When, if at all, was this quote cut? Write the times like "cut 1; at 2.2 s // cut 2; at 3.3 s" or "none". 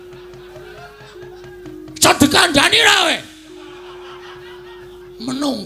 none